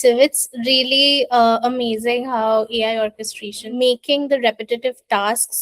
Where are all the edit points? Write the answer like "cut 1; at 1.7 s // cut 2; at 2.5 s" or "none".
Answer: cut 1; at 3.6 s

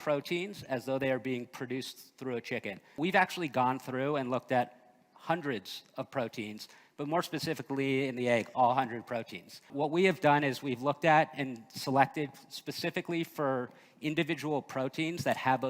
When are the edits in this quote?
cut 1; at 2.9 s // cut 2; at 9.7 s

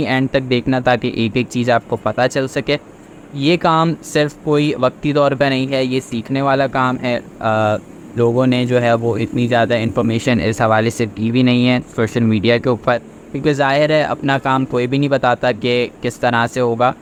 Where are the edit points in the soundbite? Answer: none

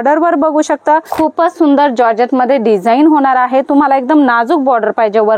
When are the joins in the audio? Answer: cut 1; at 1.1 s

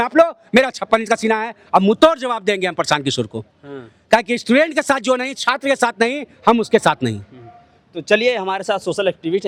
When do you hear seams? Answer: none

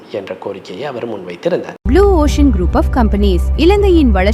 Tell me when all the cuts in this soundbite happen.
cut 1; at 1.8 s

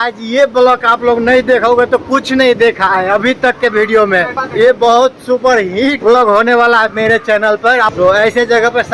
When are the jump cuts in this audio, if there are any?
cut 1; at 4.4 s // cut 2; at 6.0 s // cut 3; at 7.9 s

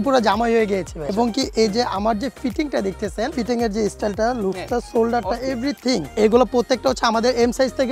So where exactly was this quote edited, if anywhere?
cut 1; at 1.1 s // cut 2; at 6.1 s

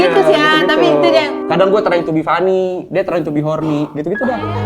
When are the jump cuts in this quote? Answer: cut 1; at 1.4 s

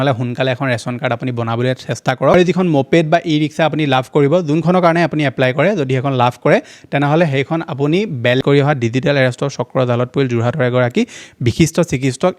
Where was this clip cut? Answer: cut 1; at 2.3 s // cut 2; at 8.4 s

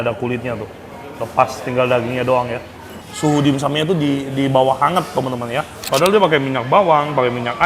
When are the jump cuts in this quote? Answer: cut 1; at 3.1 s // cut 2; at 5.8 s

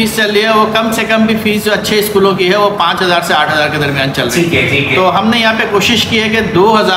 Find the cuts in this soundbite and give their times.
none

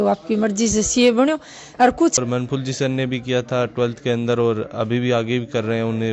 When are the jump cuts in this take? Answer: cut 1; at 2.2 s

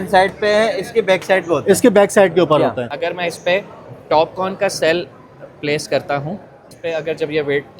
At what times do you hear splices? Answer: cut 1; at 2.9 s // cut 2; at 6.7 s

